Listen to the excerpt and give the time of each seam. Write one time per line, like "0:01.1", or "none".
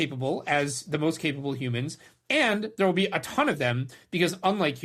none